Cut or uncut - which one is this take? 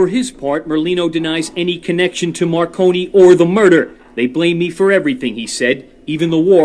uncut